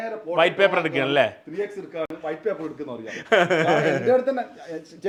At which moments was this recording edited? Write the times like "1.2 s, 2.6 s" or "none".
none